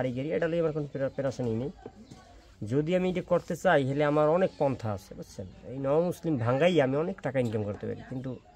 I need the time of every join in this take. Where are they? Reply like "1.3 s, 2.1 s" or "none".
none